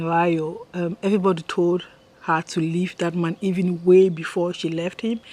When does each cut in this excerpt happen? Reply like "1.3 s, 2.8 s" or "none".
none